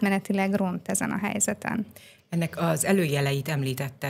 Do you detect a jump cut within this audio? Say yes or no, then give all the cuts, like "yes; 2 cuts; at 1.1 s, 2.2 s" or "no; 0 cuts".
no; 0 cuts